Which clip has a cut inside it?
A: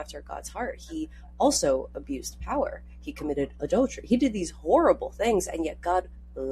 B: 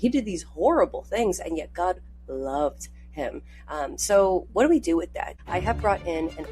B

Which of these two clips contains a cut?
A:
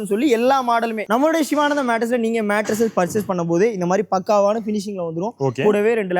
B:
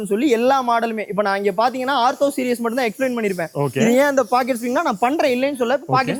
A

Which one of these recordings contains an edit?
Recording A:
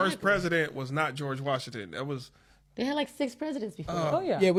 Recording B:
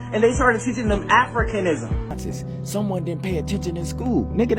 B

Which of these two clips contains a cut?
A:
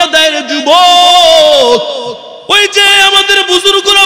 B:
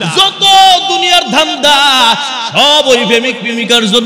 A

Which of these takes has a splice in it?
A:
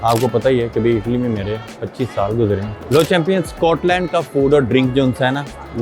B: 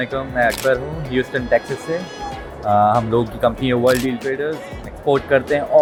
A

